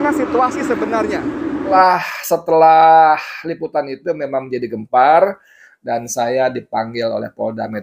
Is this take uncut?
no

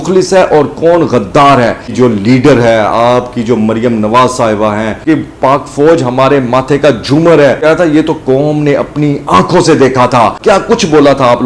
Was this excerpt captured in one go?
no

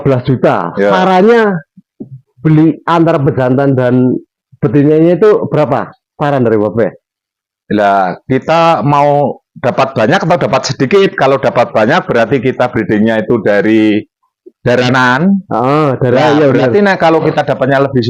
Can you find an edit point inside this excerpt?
no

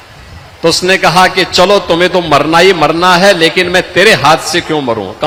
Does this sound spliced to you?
no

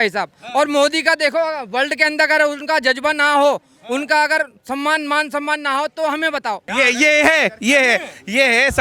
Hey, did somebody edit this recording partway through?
yes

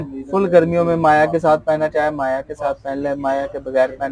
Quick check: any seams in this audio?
no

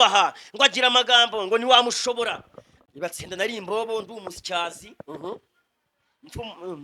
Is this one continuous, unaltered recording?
no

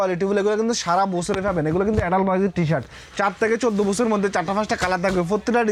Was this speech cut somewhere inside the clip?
no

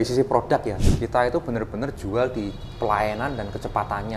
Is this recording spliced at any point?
yes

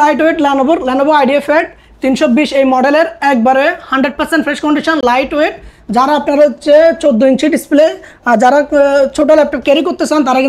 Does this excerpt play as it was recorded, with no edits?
yes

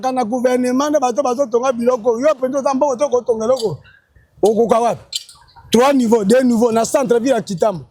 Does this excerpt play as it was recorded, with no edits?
yes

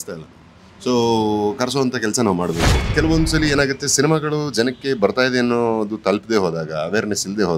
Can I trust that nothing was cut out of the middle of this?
no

